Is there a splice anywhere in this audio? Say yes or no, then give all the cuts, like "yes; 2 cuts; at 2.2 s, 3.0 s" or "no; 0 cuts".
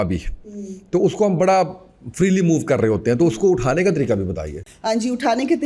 no; 0 cuts